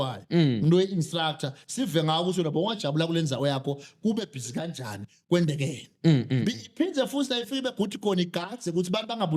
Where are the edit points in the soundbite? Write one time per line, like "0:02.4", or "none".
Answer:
none